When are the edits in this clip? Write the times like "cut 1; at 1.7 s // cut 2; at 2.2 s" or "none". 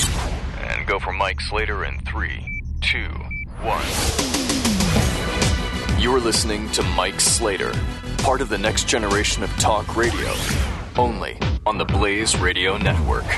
none